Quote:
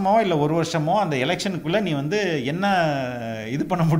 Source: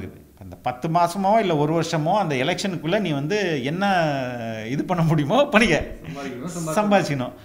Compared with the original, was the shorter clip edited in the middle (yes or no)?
no